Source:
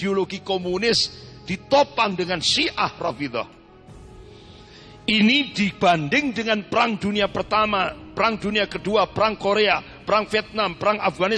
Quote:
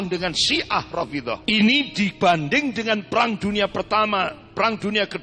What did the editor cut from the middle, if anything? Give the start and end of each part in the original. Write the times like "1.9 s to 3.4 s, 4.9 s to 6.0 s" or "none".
3.5 s to 5.0 s